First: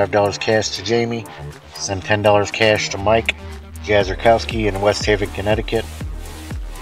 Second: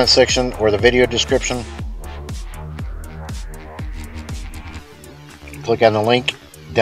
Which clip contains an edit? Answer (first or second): second